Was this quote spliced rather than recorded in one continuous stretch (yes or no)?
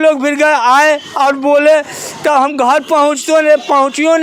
no